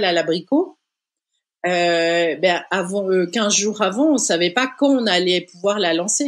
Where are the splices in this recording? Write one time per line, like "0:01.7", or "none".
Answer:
none